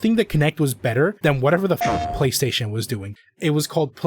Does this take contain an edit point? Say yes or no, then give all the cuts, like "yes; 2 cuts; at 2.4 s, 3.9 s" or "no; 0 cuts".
yes; 2 cuts; at 1.2 s, 3.2 s